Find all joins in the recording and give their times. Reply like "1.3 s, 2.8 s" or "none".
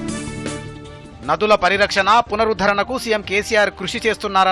0.9 s